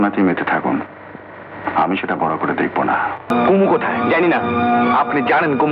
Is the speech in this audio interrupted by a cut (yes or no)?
yes